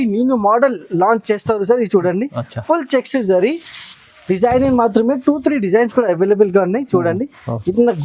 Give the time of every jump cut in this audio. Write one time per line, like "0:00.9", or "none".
none